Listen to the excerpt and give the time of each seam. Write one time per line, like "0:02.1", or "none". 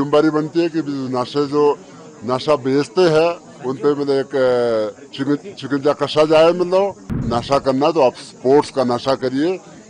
0:07.3